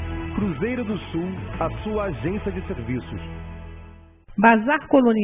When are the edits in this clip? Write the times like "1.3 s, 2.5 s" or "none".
4.2 s